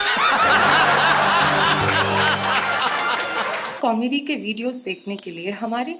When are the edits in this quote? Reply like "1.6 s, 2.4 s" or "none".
3.6 s